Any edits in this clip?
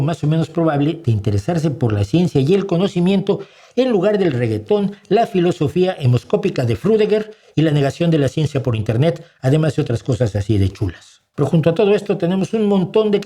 no; 0 cuts

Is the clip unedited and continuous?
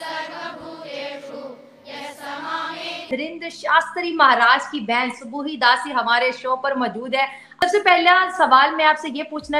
no; 2 cuts; at 3.0 s, 7.6 s

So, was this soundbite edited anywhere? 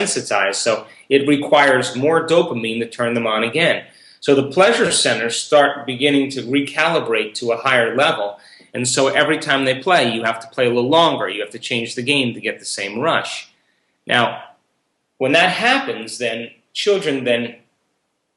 no; 0 cuts

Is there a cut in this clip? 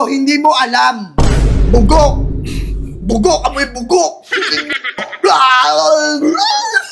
no; 0 cuts

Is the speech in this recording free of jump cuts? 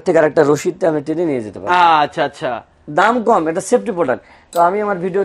yes; 0 cuts

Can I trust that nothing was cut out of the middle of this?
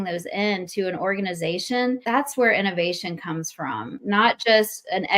no; 2 cuts; at 2.0 s, 3.9 s

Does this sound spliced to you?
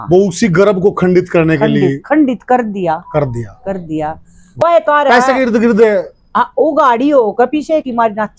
yes; 1 cut; at 4.6 s

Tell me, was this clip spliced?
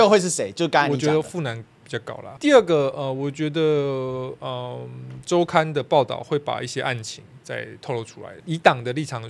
yes; 2 cuts; at 2.3 s, 8.3 s

